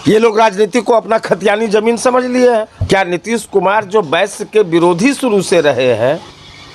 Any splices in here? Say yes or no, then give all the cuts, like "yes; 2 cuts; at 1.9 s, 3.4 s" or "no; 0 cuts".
yes; 1 cut; at 2.8 s